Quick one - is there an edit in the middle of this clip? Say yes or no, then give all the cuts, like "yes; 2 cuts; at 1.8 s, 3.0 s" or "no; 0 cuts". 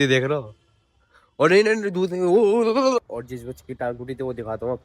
yes; 1 cut; at 3.1 s